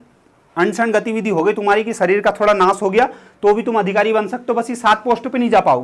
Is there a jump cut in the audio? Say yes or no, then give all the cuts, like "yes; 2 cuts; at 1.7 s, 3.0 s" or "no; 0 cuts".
no; 0 cuts